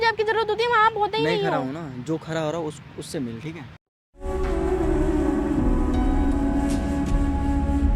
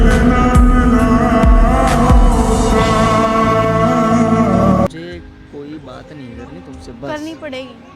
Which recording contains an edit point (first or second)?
second